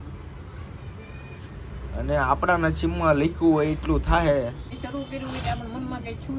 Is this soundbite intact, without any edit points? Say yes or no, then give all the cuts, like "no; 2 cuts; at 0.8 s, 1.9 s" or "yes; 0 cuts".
no; 1 cut; at 4.7 s